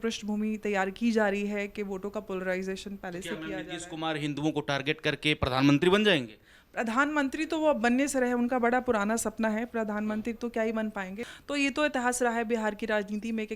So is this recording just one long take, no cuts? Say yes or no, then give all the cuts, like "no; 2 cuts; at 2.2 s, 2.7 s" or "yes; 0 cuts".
no; 1 cut; at 11.2 s